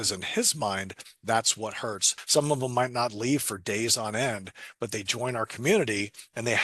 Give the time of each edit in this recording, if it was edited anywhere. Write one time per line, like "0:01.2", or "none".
0:02.1